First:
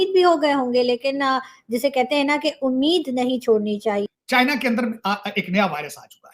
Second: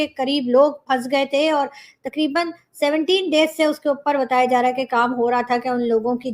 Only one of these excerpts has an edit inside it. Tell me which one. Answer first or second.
first